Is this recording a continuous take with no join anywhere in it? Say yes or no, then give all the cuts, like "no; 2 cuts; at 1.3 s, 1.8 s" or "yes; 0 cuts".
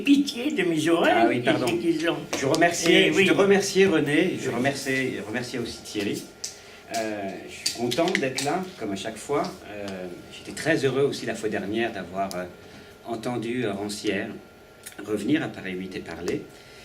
no; 1 cut; at 9.1 s